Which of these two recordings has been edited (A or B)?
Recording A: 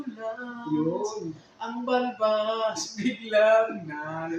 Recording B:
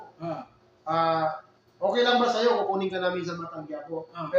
B